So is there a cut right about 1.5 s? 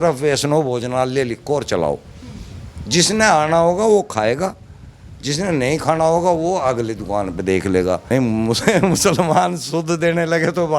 no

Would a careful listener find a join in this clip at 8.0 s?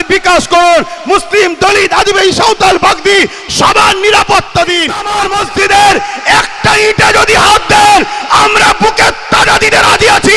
no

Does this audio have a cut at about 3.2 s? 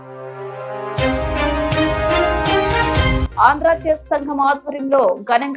yes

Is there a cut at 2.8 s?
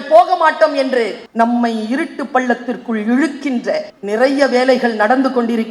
no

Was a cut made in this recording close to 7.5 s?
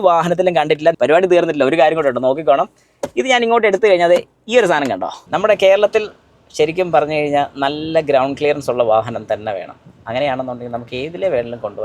no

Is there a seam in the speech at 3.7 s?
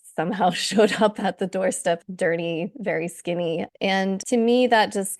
yes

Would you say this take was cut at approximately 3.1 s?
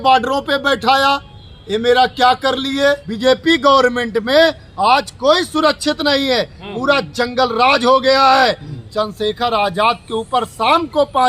yes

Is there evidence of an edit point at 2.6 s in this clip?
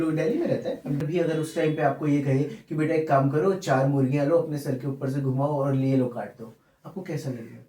no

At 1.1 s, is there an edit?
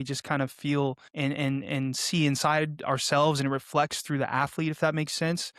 yes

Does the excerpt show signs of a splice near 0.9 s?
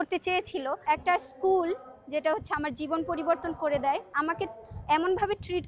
yes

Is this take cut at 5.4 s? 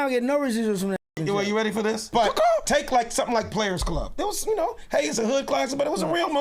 no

